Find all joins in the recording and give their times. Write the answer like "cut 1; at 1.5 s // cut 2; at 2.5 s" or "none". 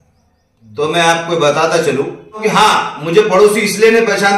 cut 1; at 2.4 s

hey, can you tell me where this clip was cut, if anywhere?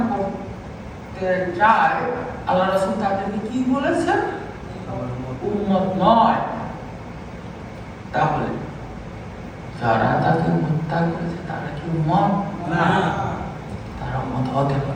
none

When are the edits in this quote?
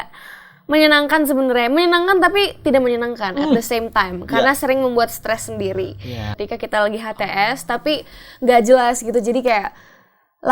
cut 1; at 6.3 s

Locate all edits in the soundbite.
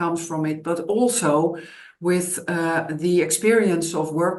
none

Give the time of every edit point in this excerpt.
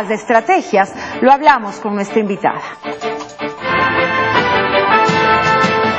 cut 1; at 1.8 s

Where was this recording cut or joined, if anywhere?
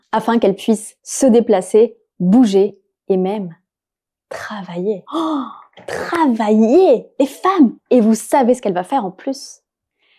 cut 1; at 7.8 s

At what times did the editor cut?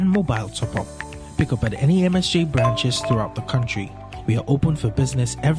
none

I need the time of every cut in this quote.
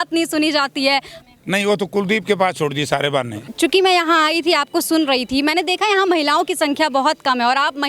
cut 1; at 1.2 s // cut 2; at 3.5 s

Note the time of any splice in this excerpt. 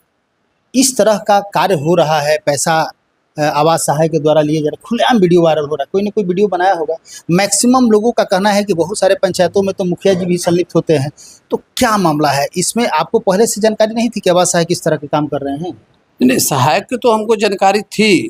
none

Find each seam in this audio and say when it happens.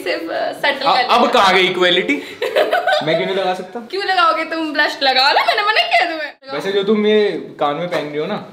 none

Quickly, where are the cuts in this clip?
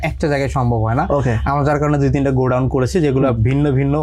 none

